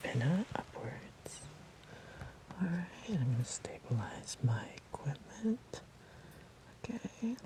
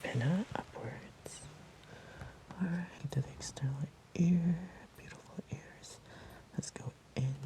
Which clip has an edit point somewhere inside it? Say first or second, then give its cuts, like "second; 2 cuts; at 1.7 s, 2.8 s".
second; 1 cut; at 3.0 s